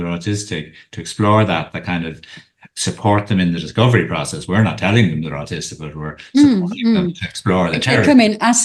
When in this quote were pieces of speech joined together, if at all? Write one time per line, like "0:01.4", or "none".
none